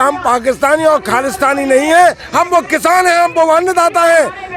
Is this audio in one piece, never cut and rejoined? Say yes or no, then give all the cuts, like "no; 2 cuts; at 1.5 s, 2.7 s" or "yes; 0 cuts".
yes; 0 cuts